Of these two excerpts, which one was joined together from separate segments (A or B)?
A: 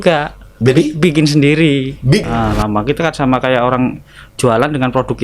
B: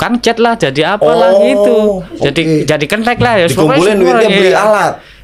A